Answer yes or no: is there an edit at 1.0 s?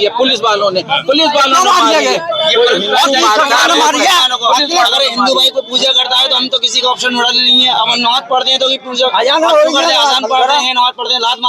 no